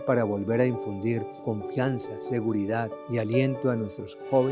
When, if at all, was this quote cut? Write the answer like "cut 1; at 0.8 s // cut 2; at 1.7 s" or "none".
cut 1; at 1.3 s // cut 2; at 3.0 s